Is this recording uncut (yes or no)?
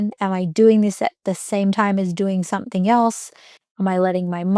yes